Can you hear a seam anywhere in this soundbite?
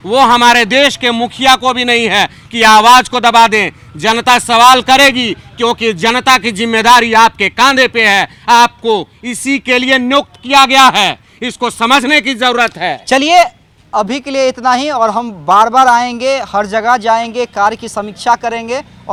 no; 0 cuts

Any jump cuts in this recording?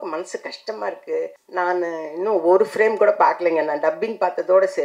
yes; 1 cut; at 1.4 s

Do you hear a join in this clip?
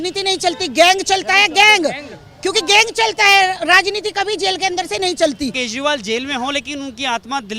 yes; 1 cut; at 5.6 s

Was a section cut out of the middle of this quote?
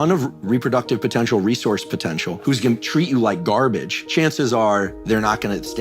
yes; 2 cuts; at 2.4 s, 3.9 s

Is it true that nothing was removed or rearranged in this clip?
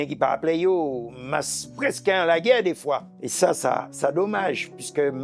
yes; 0 cuts

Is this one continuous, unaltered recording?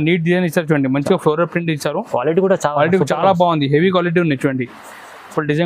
yes; 0 cuts

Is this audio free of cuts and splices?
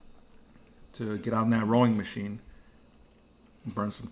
yes; 0 cuts

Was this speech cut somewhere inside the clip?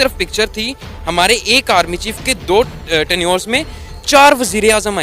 yes; 1 cut; at 2.4 s

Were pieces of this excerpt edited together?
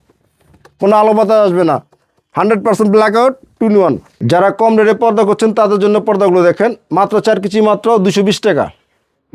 yes; 1 cut; at 4.1 s

